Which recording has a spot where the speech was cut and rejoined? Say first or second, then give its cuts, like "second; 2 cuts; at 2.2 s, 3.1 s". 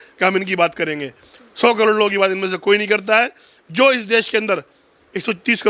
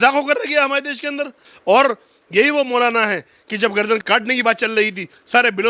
second; 1 cut; at 1.4 s